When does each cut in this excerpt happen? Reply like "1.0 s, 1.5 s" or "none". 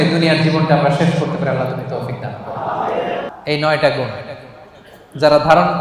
3.2 s

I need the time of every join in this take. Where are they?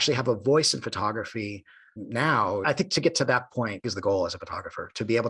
2.6 s, 3.8 s

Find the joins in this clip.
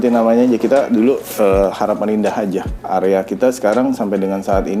2.7 s

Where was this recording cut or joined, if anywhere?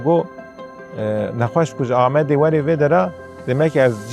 none

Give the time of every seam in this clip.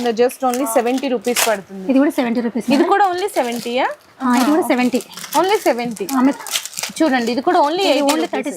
none

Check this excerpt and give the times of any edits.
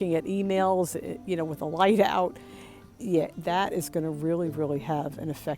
none

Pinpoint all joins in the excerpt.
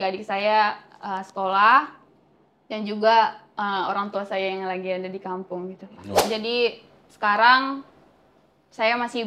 6.2 s

